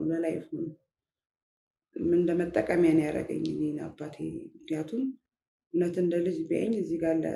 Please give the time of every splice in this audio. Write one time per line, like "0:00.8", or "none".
none